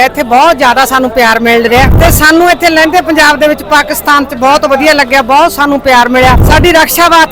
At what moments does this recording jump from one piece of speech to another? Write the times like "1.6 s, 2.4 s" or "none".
1.9 s, 6.4 s